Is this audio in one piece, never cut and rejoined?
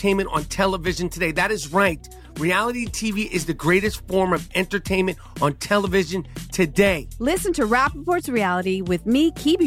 yes; 0 cuts

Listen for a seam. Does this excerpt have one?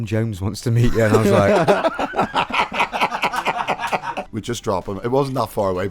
yes; 1 cut; at 4.2 s

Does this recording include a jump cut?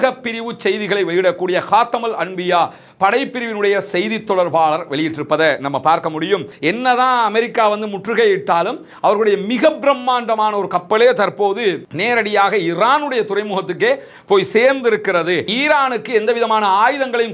yes; 2 cuts; at 6.5 s, 15.5 s

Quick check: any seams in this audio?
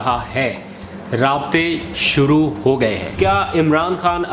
yes; 1 cut; at 3.1 s

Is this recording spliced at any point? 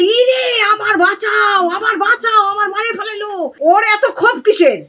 yes; 1 cut; at 3.5 s

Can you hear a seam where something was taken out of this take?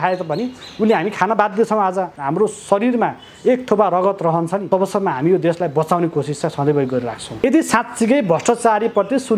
yes; 3 cuts; at 2.2 s, 4.6 s, 7.4 s

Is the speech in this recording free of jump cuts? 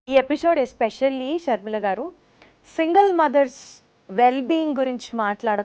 yes; 0 cuts

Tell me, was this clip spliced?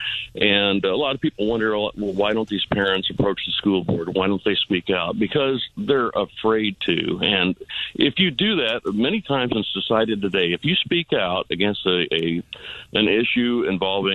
yes; 1 cut; at 1.2 s

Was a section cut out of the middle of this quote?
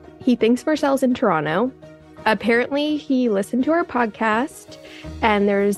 no; 0 cuts

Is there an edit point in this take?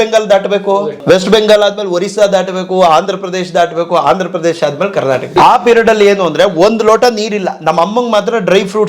yes; 2 cuts; at 0.9 s, 5.3 s

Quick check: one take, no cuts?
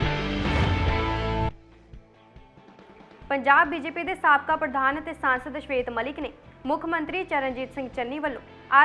yes; 0 cuts

